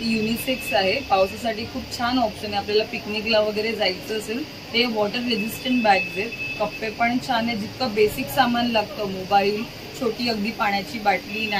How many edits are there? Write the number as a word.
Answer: zero